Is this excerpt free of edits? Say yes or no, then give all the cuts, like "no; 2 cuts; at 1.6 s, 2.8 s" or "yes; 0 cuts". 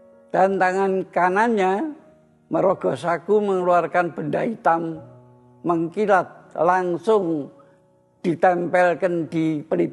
yes; 0 cuts